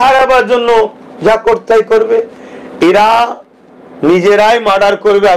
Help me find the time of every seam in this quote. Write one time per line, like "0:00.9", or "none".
none